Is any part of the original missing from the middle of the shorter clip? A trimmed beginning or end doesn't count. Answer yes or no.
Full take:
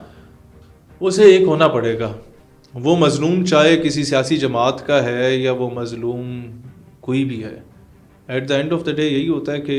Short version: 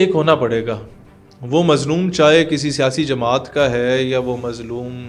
no